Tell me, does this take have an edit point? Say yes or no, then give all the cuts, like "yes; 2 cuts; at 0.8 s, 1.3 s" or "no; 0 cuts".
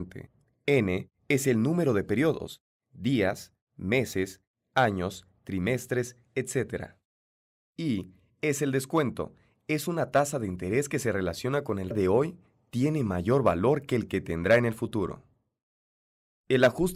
no; 0 cuts